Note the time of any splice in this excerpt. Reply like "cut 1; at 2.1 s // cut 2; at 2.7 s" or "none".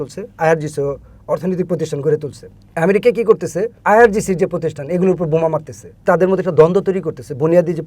cut 1; at 3.7 s // cut 2; at 6.0 s